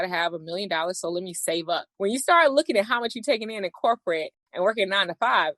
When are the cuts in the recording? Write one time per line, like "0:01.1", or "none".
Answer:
0:04.4